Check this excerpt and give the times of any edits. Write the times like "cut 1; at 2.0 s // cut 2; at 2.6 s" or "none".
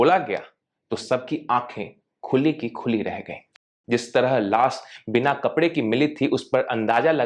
cut 1; at 3.7 s